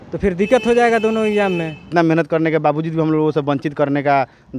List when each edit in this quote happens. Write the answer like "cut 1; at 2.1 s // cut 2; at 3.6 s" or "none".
cut 1; at 1.8 s